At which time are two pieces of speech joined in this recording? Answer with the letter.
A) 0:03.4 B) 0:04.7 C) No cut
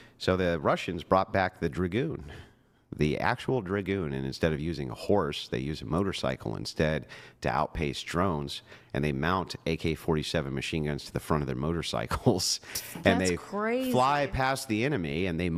C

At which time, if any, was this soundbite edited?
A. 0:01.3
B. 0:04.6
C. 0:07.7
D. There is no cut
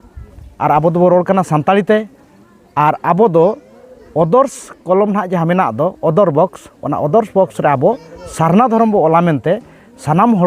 D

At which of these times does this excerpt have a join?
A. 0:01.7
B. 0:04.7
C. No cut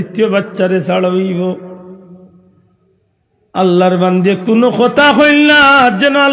C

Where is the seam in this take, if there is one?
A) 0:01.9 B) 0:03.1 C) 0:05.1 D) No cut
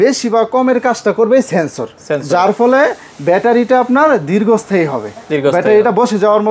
D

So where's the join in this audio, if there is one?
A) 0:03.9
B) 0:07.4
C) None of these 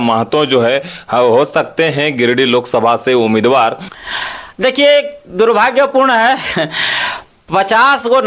A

